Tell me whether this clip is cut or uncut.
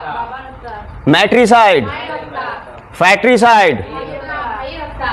uncut